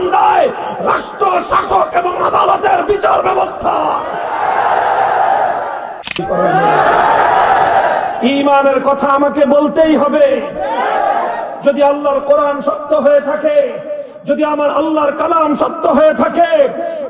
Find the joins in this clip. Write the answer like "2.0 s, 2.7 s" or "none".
6.2 s